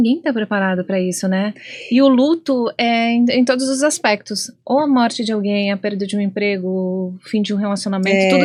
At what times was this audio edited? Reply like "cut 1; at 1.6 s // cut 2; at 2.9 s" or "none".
none